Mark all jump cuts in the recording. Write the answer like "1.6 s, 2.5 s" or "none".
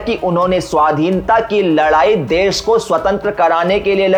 none